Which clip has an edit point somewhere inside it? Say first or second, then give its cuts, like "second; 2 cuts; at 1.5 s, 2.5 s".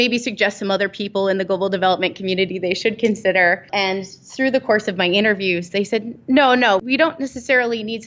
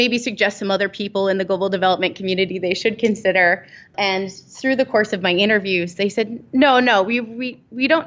first; 2 cuts; at 3.6 s, 6.8 s